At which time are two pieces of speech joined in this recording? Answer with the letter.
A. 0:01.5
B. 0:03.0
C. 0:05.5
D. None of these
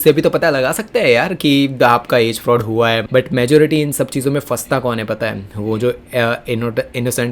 B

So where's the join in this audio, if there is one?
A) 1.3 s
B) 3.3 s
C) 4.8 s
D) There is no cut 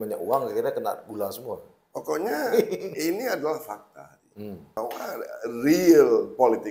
C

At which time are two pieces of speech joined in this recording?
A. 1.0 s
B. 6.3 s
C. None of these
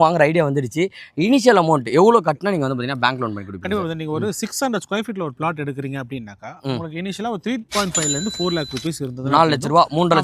C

